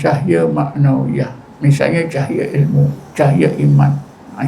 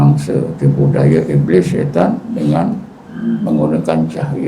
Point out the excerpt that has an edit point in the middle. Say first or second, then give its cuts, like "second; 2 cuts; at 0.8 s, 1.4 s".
first; 2 cuts; at 1.4 s, 3.0 s